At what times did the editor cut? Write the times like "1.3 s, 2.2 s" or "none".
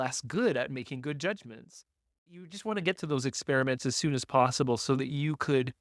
2.3 s

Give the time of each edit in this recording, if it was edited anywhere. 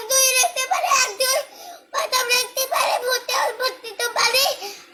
none

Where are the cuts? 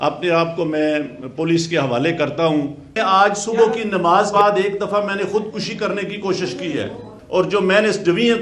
3.0 s, 4.3 s, 7.2 s

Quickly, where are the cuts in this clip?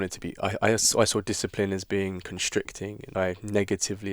3.1 s

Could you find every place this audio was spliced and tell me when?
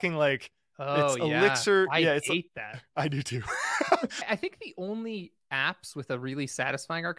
4.2 s

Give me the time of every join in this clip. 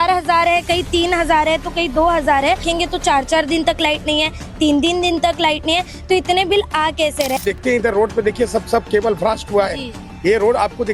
2.7 s, 7.4 s

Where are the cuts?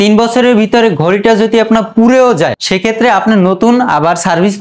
2.6 s

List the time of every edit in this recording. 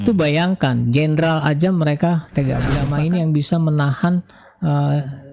2.8 s

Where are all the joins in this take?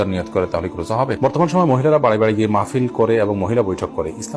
0.9 s

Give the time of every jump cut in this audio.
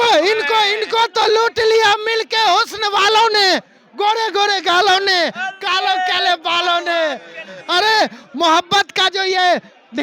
none

